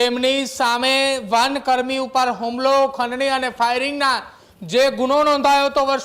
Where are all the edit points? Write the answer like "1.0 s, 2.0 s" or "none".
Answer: none

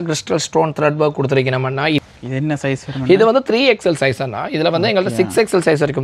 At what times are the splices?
2.0 s

